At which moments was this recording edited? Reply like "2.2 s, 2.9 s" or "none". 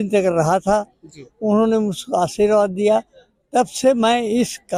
none